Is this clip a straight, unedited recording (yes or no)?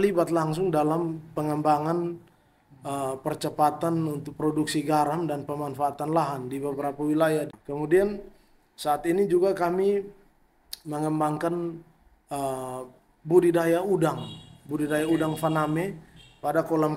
no